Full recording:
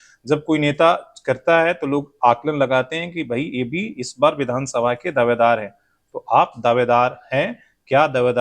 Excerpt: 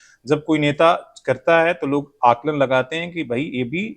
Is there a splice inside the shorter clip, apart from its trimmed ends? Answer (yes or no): no